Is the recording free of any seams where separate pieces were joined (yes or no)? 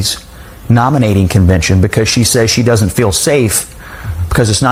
yes